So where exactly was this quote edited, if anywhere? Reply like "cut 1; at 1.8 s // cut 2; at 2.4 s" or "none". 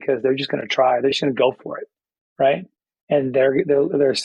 none